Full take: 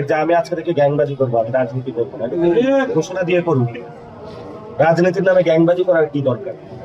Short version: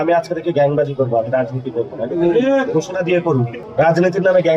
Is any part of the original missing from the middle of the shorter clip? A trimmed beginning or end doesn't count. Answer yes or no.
yes